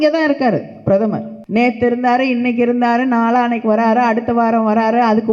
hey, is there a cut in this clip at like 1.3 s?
yes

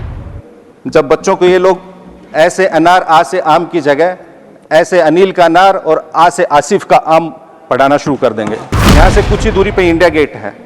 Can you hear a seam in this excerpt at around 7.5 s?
no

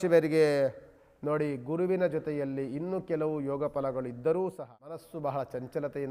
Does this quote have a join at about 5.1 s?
yes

